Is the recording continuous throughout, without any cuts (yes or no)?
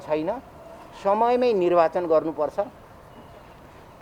yes